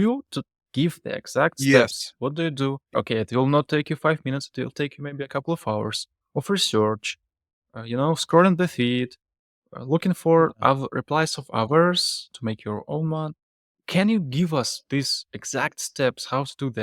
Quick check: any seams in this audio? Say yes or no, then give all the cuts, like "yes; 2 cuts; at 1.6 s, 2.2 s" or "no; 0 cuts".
yes; 1 cut; at 2.9 s